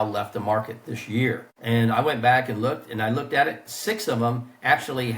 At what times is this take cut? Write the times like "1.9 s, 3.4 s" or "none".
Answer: 1.5 s